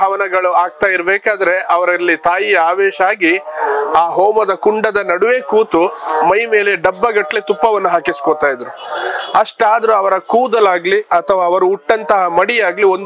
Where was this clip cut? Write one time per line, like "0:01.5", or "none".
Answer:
none